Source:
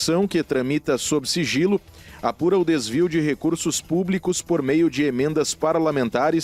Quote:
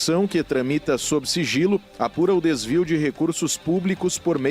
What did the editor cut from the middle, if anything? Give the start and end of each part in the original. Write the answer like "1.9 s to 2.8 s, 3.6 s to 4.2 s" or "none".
1.9 s to 2.1 s